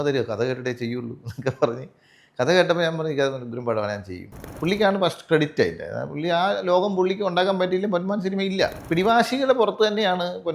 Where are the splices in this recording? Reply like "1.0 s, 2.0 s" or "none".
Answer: 4.5 s, 8.8 s